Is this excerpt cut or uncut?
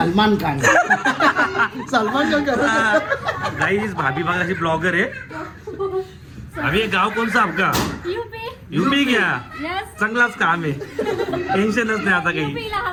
uncut